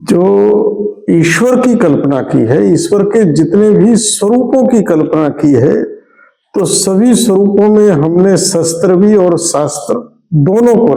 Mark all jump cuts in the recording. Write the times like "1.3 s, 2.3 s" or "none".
none